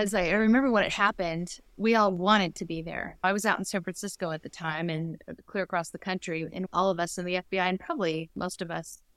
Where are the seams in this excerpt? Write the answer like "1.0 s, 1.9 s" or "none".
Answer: 1.6 s, 3.2 s, 6.6 s